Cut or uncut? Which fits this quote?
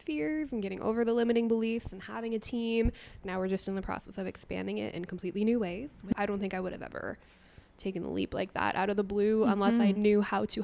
cut